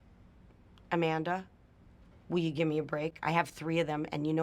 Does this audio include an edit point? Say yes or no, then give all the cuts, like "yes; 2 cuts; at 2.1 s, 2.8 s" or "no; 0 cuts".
yes; 1 cut; at 3.2 s